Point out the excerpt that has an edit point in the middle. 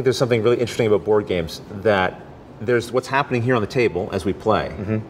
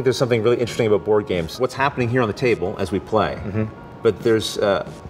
second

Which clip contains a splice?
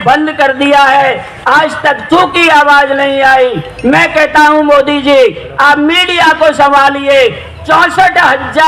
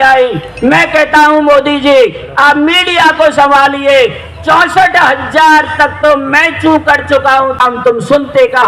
second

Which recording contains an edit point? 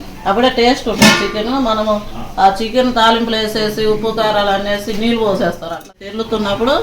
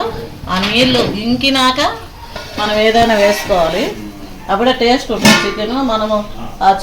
first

